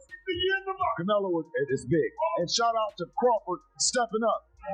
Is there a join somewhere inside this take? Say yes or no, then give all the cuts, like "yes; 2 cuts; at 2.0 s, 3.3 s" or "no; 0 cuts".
no; 0 cuts